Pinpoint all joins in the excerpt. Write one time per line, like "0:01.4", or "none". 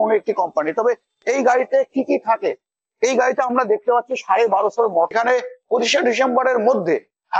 0:05.1

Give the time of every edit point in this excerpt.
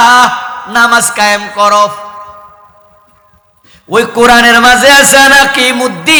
none

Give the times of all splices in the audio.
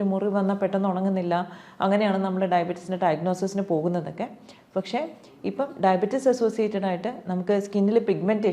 none

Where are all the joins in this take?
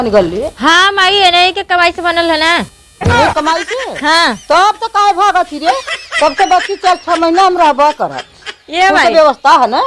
0:06.0

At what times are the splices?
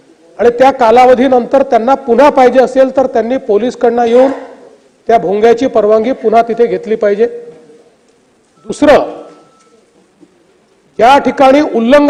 none

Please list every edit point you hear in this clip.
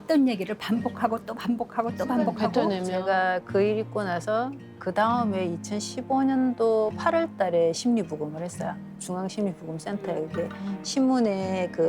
0:02.9

